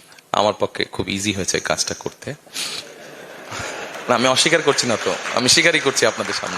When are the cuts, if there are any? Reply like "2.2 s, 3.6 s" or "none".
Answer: none